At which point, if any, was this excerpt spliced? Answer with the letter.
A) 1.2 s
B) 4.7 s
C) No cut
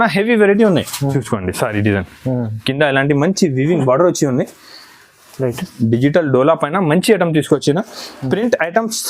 A